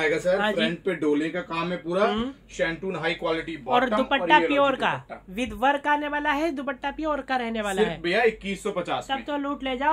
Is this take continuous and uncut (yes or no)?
yes